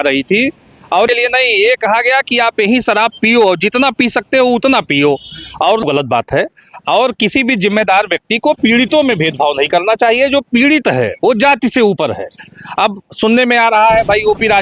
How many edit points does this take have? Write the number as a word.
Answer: two